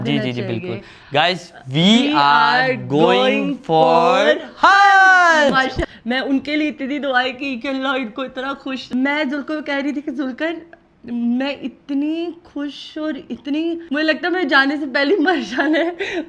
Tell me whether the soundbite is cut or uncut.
cut